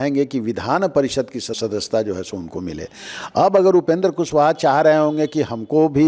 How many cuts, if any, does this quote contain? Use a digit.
1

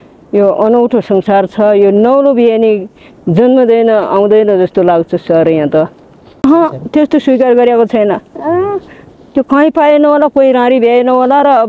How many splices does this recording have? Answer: 1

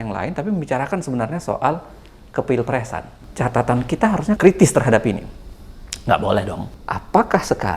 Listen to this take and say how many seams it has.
3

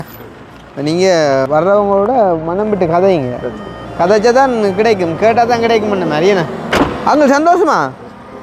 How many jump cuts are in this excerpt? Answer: 2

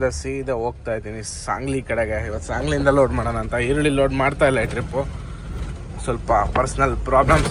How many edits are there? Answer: 0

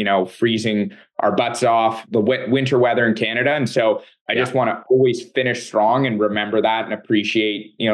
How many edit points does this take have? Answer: 0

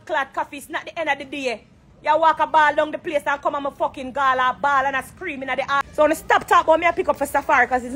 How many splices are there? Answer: 1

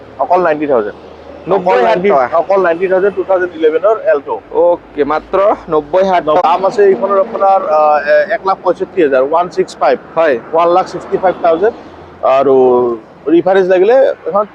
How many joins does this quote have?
1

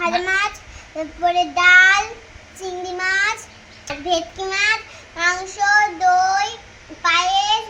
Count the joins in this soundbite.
1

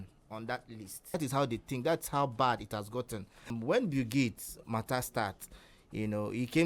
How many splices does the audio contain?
2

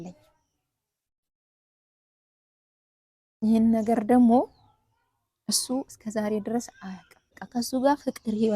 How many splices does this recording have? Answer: 1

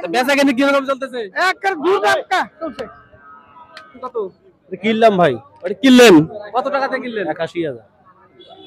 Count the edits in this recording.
1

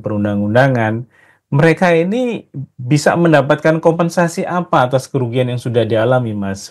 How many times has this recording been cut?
0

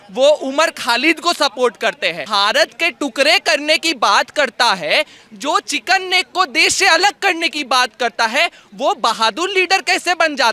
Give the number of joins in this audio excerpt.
1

